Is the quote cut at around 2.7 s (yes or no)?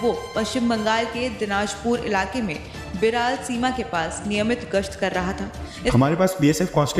no